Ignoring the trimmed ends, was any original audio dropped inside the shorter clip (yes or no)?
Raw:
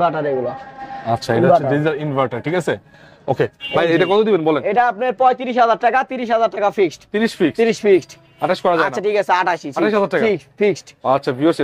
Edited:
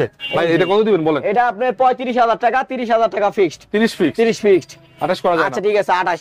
no